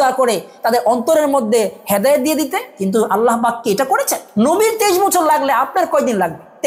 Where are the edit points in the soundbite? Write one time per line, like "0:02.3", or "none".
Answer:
none